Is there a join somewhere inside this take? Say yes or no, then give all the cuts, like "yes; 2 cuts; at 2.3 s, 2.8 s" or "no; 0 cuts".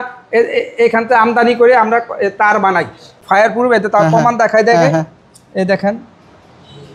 yes; 1 cut; at 3.2 s